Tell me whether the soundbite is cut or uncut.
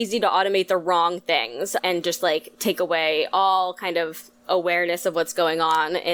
uncut